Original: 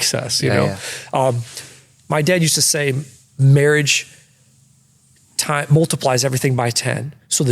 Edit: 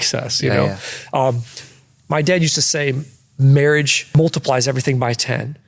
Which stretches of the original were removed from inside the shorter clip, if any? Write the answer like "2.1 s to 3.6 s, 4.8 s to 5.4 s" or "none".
4.1 s to 5.6 s